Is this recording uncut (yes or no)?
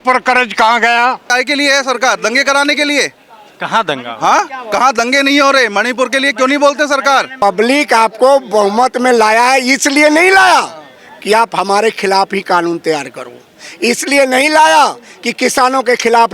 no